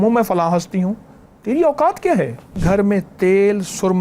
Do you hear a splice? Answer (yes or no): yes